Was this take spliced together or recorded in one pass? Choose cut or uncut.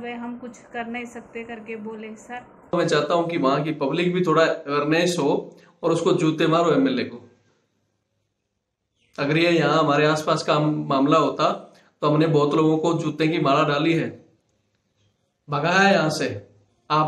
cut